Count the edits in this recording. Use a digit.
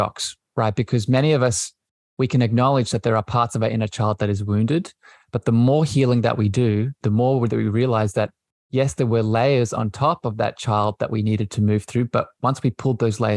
1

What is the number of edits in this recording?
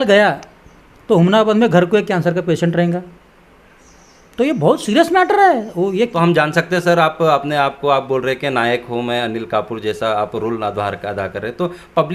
1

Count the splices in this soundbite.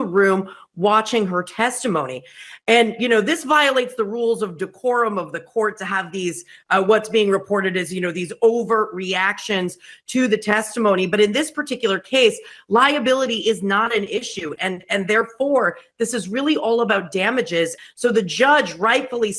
0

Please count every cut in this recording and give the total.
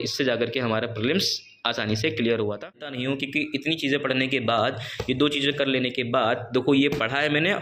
1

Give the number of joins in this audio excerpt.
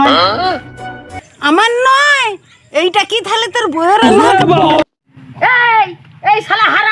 1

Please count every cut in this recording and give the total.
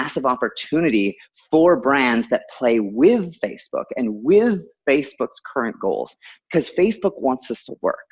0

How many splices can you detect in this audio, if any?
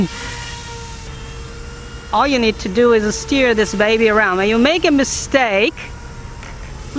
1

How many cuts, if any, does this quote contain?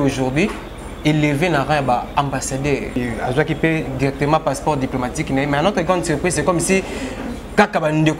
1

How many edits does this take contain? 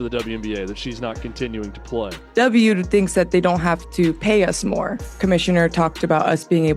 2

